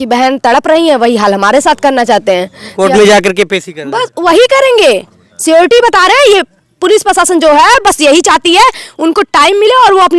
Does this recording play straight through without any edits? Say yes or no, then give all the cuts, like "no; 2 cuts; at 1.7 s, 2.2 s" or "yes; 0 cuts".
yes; 0 cuts